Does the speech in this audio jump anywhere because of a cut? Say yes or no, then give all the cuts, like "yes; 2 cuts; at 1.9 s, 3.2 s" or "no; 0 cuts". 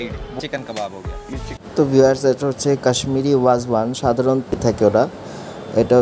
yes; 1 cut; at 4.6 s